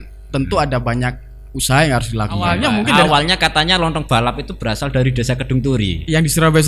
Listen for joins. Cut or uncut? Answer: cut